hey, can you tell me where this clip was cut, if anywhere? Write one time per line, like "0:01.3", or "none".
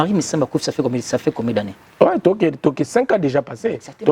0:01.8